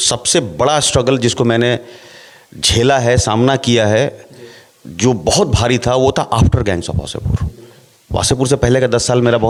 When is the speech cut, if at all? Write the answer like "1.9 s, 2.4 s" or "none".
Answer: none